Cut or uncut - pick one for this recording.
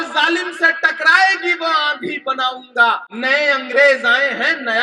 cut